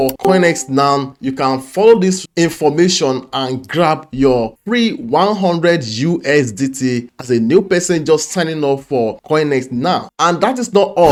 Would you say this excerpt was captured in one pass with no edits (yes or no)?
yes